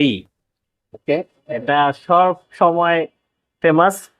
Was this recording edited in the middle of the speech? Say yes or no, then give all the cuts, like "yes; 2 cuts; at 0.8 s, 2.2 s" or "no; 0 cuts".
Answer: no; 0 cuts